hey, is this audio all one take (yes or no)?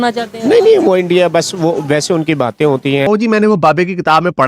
no